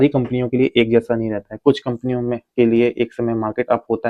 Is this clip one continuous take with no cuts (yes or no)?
yes